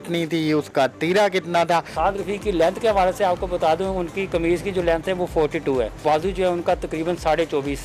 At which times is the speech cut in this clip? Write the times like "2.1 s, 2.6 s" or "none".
1.9 s, 6.0 s